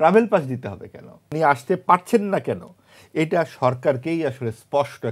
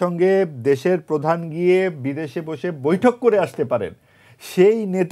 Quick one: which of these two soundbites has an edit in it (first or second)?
first